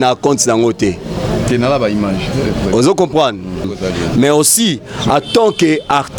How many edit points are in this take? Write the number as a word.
one